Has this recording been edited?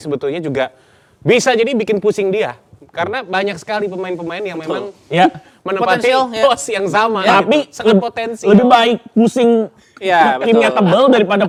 no; 0 cuts

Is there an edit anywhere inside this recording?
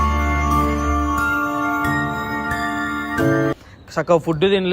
yes; 1 cut; at 3.5 s

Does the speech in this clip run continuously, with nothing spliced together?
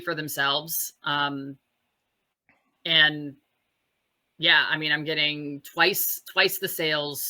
yes; 0 cuts

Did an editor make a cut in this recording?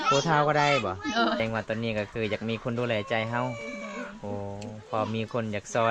yes; 1 cut; at 1.4 s

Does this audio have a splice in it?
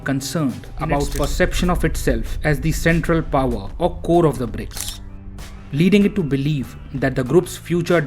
yes; 1 cut; at 1.1 s

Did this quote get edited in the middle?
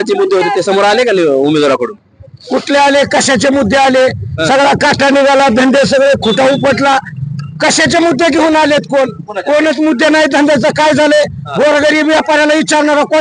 no; 0 cuts

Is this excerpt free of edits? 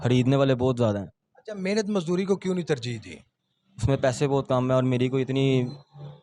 yes; 0 cuts

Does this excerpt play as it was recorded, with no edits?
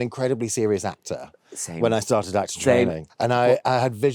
no; 1 cut; at 3.0 s

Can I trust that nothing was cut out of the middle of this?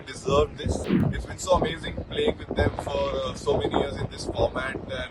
no; 1 cut; at 1.0 s

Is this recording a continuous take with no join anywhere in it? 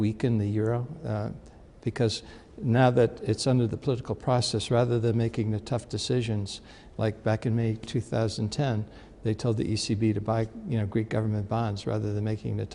no; 1 cut; at 7.6 s

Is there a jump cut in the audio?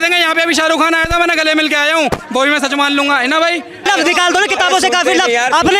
yes; 1 cut; at 3.9 s

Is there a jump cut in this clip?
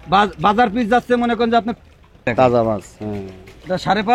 yes; 1 cut; at 2.3 s

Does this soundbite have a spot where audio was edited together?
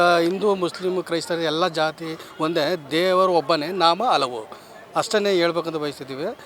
no; 0 cuts

